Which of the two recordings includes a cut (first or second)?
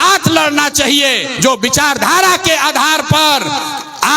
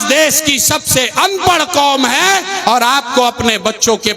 first